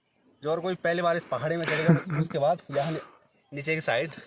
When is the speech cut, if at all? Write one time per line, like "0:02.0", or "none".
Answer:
none